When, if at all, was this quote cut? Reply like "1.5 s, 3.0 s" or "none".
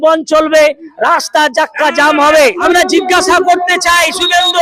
2.6 s